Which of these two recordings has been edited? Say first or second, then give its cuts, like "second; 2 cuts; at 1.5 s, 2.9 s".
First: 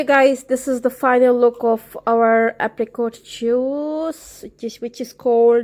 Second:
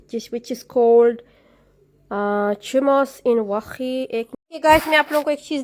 second; 1 cut; at 4.3 s